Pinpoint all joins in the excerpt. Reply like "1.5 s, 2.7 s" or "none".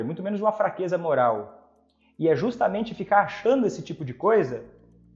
none